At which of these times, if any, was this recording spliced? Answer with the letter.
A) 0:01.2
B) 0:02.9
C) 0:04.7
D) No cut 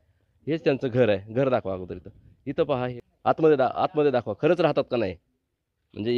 B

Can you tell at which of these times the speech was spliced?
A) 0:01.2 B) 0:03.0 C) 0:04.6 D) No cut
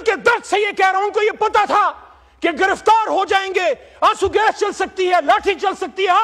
D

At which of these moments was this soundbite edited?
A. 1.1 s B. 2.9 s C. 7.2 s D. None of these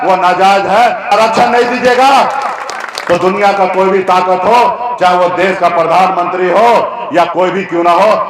A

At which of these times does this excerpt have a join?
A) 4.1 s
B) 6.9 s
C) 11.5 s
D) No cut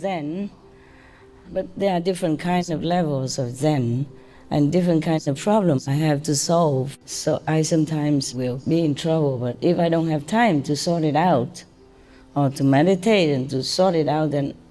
B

